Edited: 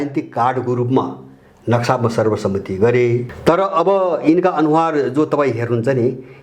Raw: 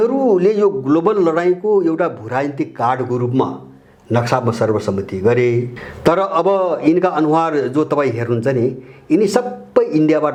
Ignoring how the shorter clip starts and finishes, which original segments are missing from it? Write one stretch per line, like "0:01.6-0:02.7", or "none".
0:05.7-0:05.9